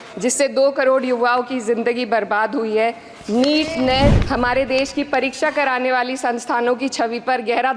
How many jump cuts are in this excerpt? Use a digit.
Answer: 1